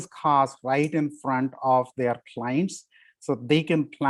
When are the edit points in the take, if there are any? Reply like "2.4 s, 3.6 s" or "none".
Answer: none

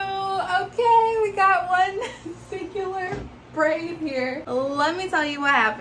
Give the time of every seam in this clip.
4.4 s

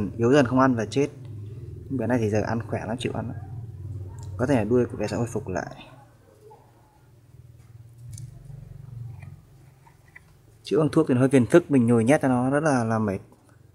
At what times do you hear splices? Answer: 7.0 s

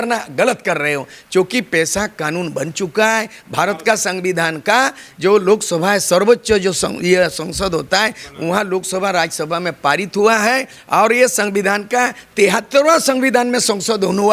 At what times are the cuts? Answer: none

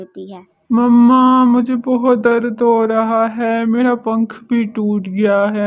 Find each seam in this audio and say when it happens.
none

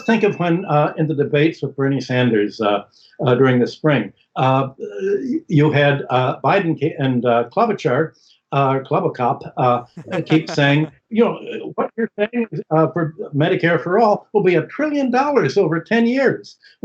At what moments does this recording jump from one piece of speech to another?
none

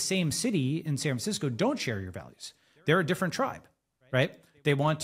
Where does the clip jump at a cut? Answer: none

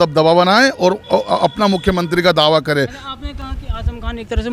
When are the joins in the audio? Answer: none

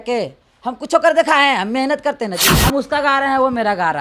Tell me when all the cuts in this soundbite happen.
2.5 s

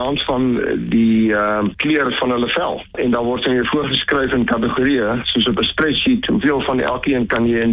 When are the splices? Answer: 1.8 s, 2.9 s

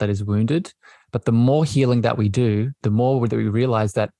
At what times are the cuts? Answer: 2.8 s

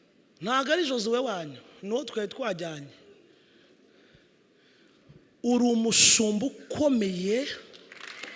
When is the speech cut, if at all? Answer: none

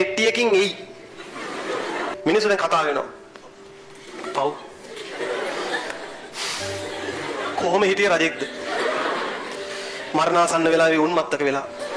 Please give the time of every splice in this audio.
2.1 s

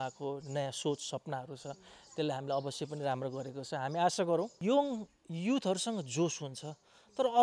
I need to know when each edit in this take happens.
4.5 s

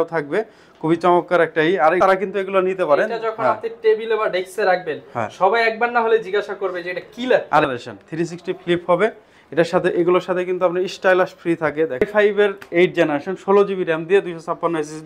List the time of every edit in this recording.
2.0 s, 7.6 s, 12.1 s

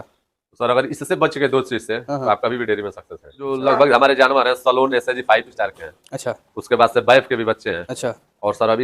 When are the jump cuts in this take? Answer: 3.6 s

